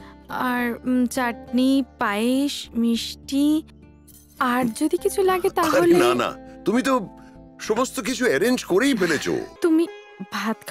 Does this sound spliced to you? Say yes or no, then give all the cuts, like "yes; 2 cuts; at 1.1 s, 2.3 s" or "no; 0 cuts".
yes; 1 cut; at 9.5 s